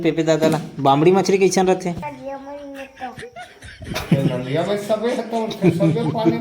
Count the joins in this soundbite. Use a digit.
1